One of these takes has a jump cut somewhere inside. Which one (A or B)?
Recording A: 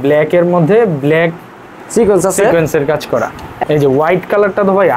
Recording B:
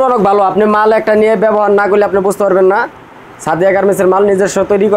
A